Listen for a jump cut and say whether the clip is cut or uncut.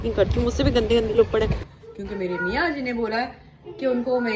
cut